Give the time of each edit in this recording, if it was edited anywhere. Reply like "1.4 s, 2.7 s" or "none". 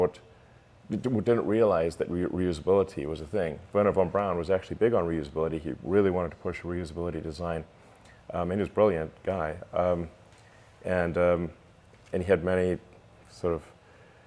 none